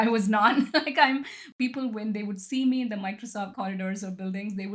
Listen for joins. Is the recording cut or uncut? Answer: cut